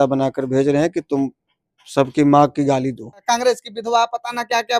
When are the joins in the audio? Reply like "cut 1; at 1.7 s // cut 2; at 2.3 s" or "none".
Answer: cut 1; at 3.2 s